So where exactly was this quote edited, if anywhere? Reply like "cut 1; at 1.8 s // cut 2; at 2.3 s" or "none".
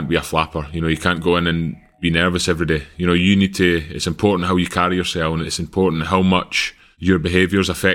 none